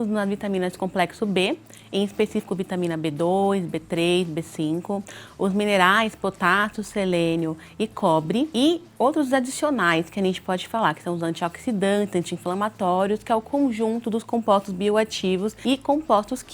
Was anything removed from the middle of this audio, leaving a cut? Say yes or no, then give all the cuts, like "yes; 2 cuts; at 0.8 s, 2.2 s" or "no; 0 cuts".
yes; 2 cuts; at 8.7 s, 15.5 s